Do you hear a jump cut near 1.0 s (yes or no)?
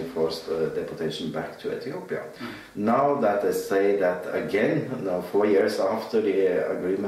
no